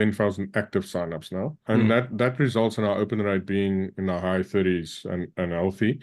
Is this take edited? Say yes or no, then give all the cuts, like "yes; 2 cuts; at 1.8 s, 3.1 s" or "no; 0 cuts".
yes; 1 cut; at 1.6 s